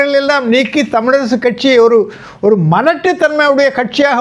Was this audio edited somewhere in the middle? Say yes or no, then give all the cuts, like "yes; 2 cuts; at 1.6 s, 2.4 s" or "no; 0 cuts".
no; 0 cuts